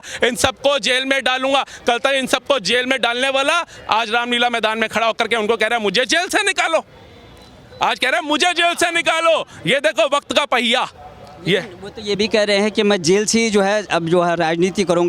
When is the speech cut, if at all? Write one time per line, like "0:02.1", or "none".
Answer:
none